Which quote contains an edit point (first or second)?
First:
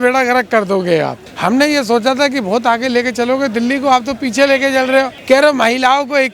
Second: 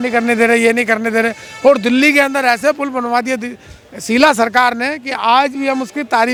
first